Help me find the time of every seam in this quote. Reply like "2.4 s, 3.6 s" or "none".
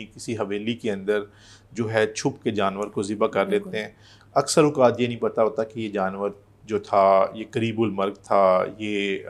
none